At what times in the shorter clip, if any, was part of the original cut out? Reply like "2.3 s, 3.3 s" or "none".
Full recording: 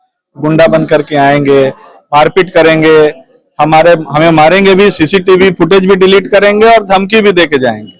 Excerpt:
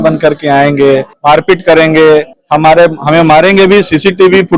1.1 s, 2.4 s